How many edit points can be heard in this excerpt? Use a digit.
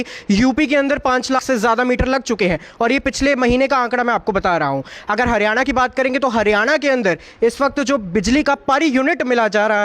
1